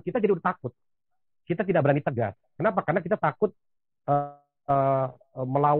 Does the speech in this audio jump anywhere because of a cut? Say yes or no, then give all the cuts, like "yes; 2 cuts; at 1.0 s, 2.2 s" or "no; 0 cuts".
no; 0 cuts